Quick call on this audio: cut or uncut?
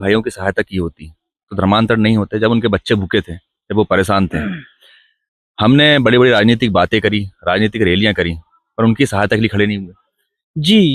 uncut